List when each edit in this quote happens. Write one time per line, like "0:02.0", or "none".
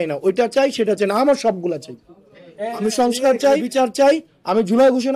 0:03.7